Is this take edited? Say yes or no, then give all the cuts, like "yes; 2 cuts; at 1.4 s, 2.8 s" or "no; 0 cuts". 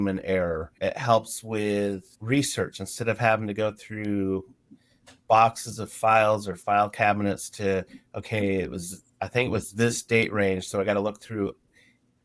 no; 0 cuts